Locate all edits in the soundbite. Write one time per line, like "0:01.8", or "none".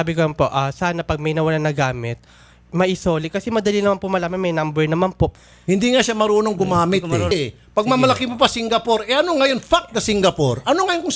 0:07.3